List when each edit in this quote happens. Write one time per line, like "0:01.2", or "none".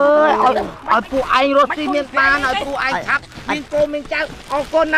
none